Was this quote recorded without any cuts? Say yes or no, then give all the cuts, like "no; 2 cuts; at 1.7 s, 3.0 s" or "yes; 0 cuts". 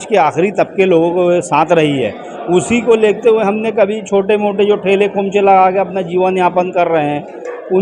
yes; 0 cuts